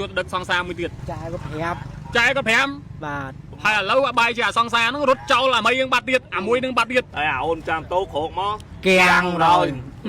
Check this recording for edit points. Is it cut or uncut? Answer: cut